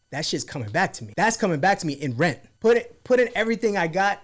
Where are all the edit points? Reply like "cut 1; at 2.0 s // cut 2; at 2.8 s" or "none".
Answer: cut 1; at 1.0 s // cut 2; at 2.5 s

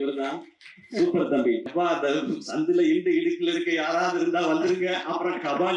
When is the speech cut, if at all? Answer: cut 1; at 1.7 s

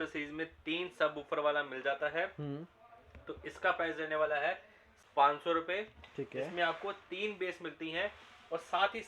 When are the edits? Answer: cut 1; at 4.9 s

